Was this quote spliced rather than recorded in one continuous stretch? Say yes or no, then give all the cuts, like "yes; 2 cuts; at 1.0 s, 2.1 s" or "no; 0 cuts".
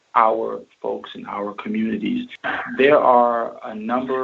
yes; 1 cut; at 2.4 s